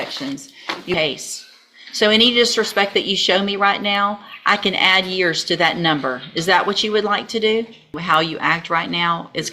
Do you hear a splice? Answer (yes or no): yes